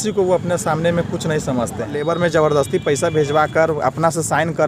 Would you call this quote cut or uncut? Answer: cut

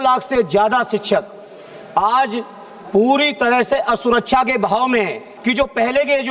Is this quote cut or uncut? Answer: cut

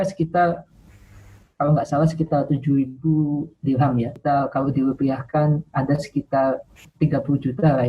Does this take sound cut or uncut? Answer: cut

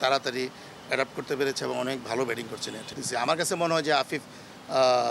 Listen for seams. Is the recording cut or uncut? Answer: cut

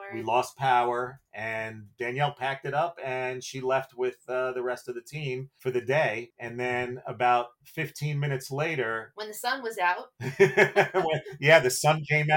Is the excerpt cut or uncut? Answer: uncut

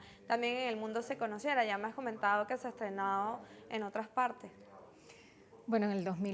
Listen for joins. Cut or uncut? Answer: cut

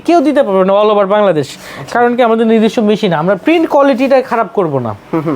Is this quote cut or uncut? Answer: uncut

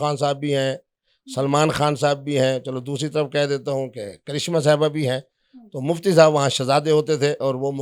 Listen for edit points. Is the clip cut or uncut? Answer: uncut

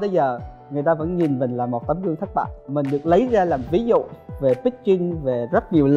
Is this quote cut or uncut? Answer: uncut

